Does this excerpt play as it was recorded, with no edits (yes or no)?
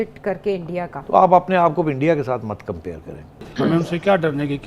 no